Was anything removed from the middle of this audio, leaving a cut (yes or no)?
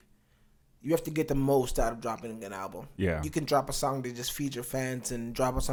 no